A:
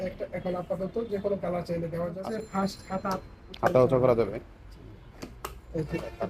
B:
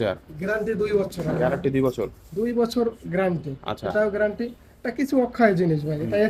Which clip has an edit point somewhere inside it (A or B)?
A